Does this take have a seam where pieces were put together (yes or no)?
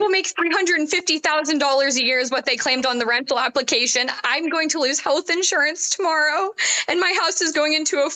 no